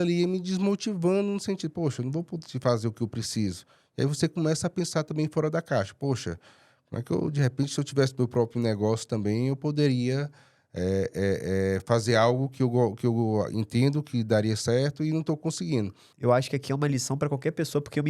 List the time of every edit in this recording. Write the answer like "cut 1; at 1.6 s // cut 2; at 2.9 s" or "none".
cut 1; at 16.1 s